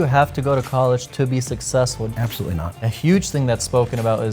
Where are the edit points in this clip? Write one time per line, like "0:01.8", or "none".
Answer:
0:02.3

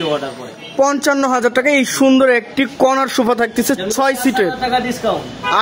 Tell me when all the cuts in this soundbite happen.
none

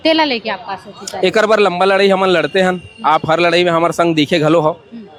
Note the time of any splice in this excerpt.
none

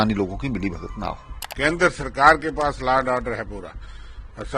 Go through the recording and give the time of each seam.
0:01.4

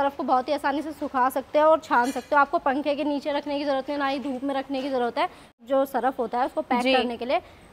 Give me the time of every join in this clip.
0:05.6

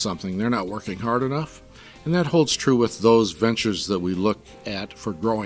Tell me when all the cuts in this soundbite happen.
0:04.6

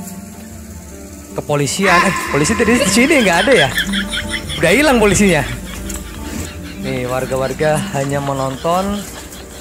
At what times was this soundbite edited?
none

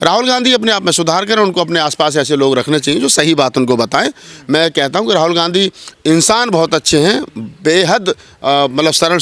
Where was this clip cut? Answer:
none

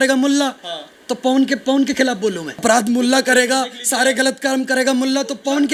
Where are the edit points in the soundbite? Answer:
0:02.6

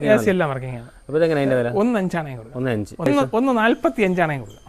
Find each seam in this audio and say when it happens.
0:03.1

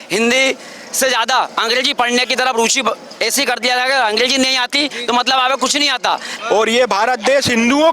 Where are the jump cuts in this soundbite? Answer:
0:06.3

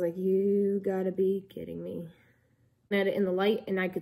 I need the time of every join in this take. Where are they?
0:02.9

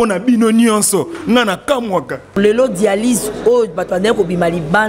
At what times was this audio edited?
0:02.4

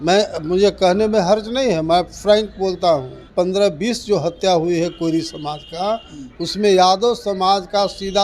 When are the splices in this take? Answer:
0:03.3

